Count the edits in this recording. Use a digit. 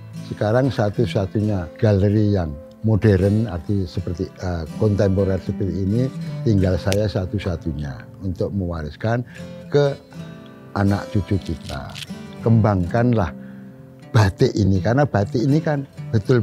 2